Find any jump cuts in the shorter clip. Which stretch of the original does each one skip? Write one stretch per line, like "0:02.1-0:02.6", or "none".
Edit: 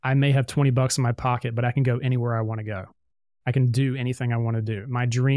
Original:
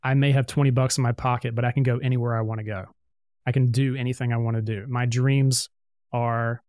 none